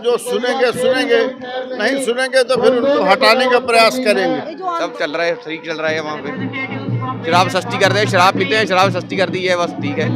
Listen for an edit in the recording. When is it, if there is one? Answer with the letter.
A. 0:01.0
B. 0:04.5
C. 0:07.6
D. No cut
B